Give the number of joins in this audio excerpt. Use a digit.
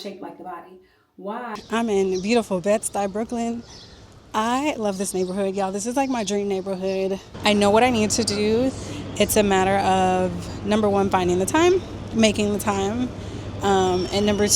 2